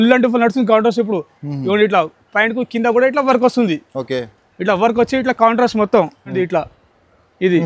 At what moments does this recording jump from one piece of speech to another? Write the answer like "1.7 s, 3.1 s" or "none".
6.3 s